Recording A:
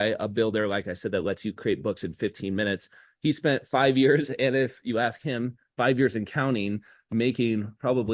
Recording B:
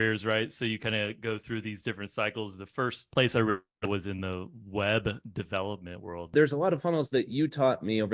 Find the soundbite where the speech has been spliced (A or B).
B